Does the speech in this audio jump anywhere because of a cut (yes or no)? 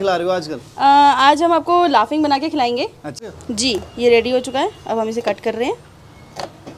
yes